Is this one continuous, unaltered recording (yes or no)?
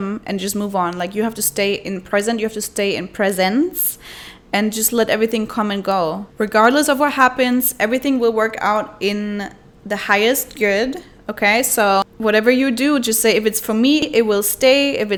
yes